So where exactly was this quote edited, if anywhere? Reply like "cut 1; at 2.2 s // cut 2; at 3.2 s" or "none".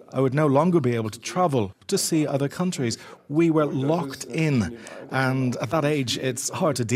none